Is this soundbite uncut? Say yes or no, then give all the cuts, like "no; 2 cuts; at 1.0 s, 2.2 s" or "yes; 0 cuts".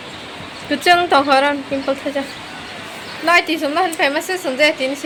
yes; 0 cuts